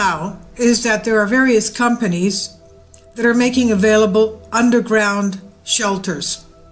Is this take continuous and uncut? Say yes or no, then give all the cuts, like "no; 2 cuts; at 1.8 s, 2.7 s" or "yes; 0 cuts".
yes; 0 cuts